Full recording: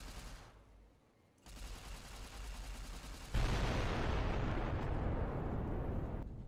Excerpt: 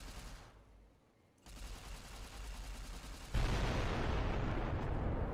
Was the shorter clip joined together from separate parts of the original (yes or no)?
no